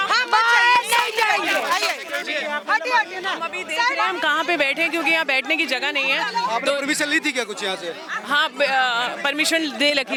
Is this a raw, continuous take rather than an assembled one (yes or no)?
yes